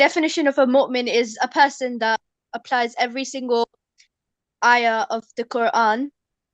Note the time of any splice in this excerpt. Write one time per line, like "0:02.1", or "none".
0:02.4